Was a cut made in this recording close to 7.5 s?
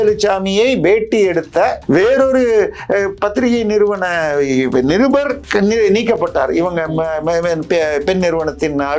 no; 2 cuts; at 1.8 s, 5.4 s

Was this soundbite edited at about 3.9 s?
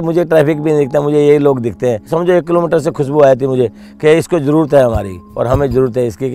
no; 1 cut; at 2.1 s

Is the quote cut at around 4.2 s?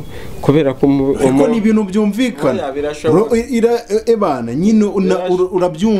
no; 0 cuts

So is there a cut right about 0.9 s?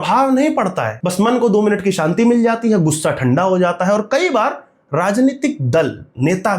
no; 0 cuts

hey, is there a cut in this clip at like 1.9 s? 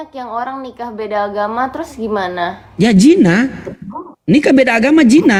no; 0 cuts

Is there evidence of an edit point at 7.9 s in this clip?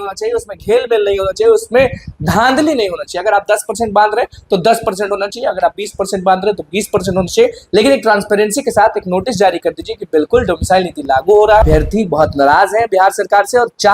no; 1 cut; at 11.6 s

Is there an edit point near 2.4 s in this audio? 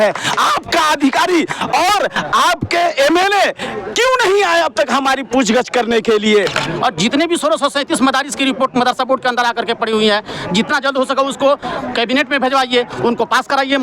no; 1 cut; at 6.6 s

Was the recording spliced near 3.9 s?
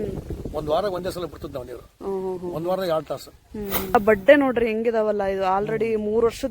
yes; 1 cut; at 3.9 s

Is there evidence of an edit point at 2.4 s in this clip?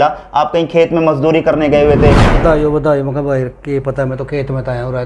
yes; 1 cut; at 2.4 s

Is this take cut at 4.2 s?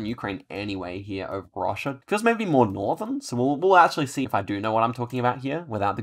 yes; 2 cuts; at 2.0 s, 4.2 s

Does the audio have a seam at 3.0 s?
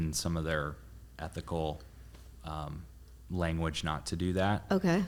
no; 0 cuts

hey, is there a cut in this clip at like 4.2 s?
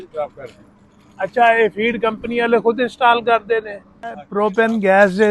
yes; 1 cut; at 4.2 s

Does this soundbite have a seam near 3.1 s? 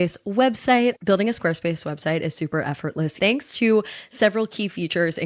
yes; 1 cut; at 3.1 s

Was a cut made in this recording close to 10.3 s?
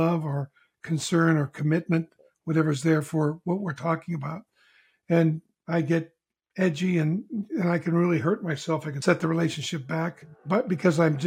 yes; 2 cuts; at 8.9 s, 10.3 s

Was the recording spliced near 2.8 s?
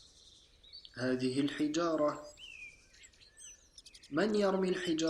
no; 1 cut; at 0.9 s

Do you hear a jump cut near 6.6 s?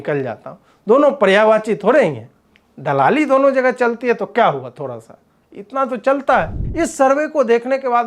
yes; 1 cut; at 6.6 s

